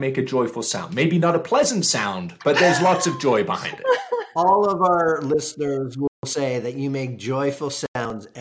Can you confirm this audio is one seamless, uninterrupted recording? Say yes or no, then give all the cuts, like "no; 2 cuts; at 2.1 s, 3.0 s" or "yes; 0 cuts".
no; 1 cut; at 4.2 s